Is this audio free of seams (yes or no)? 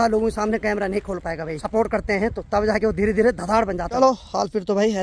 no